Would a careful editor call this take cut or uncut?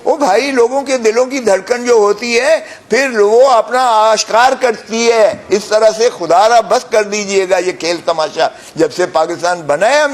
uncut